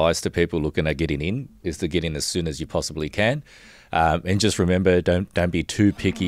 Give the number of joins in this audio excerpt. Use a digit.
0